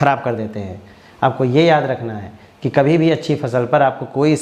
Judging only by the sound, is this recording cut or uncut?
uncut